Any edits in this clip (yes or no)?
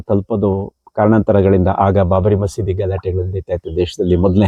no